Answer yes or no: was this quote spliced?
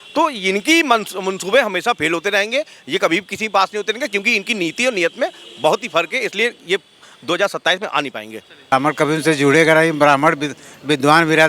yes